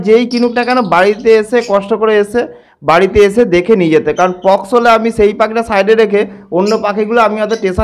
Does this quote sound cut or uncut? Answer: uncut